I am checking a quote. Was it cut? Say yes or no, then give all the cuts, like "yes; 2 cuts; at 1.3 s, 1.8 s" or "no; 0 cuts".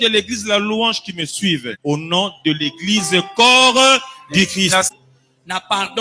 yes; 2 cuts; at 1.7 s, 4.9 s